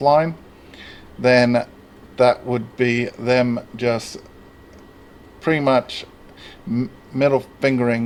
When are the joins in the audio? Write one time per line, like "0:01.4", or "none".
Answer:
none

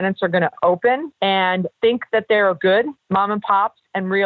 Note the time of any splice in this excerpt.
0:01.5
0:03.0

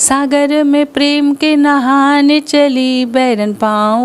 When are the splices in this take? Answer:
none

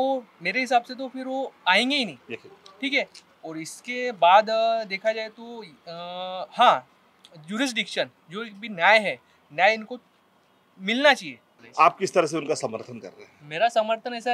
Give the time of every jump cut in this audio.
none

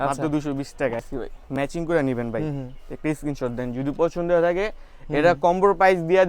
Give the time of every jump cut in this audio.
0:01.1

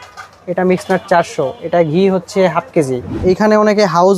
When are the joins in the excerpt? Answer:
0:03.2

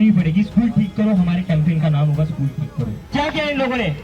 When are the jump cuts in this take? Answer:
0:03.0

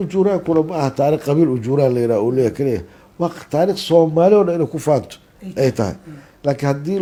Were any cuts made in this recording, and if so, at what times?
none

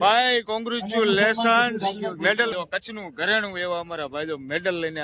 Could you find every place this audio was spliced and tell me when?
0:02.5

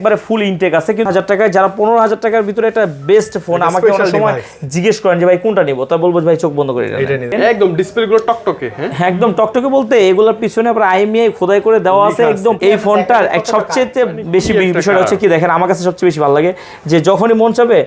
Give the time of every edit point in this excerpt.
0:01.1
0:07.3
0:12.6

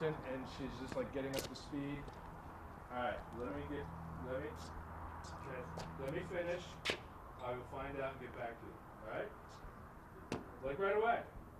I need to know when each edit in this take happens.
0:06.0

